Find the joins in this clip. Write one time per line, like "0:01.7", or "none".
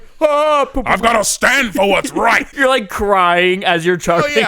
0:02.5